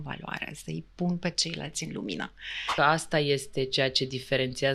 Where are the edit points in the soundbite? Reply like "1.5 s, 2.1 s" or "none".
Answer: 2.7 s